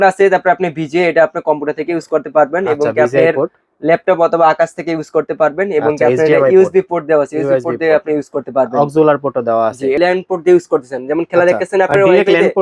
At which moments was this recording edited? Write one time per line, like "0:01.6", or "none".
0:10.0